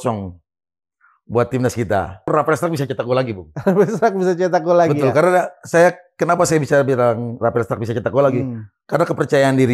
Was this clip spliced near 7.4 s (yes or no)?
no